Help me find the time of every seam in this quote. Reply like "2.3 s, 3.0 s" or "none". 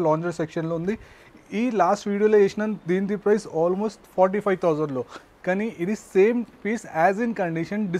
none